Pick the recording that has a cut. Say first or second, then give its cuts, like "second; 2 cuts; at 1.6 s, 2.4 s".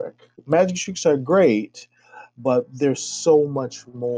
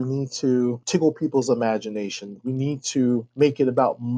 second; 2 cuts; at 0.8 s, 3.3 s